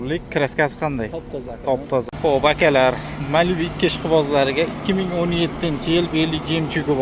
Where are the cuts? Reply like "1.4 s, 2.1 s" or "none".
2.0 s